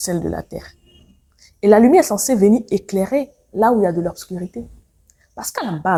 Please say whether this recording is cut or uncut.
uncut